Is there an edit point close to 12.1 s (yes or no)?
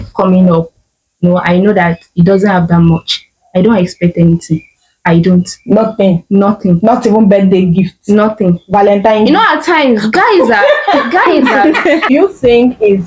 yes